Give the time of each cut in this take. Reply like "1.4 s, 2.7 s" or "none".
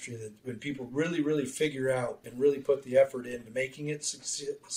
2.2 s